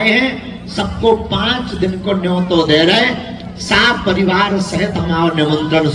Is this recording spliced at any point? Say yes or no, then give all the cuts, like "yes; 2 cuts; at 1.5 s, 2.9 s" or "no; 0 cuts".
no; 0 cuts